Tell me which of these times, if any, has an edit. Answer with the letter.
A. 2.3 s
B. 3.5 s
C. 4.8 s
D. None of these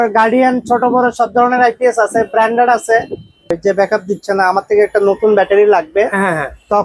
B